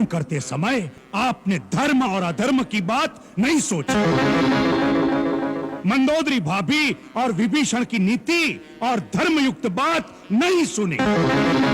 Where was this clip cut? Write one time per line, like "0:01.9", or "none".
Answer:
0:01.0